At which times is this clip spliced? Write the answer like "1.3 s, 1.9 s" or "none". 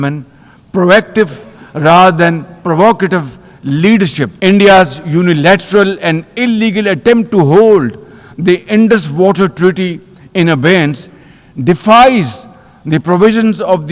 4.3 s